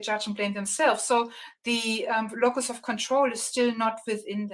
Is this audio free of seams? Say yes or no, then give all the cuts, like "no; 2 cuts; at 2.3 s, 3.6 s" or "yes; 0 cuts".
yes; 0 cuts